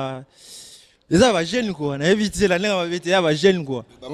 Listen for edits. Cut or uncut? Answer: uncut